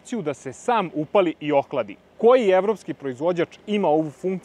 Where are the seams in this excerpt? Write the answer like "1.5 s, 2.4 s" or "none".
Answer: none